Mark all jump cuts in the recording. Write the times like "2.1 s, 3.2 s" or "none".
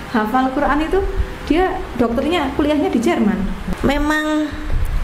3.6 s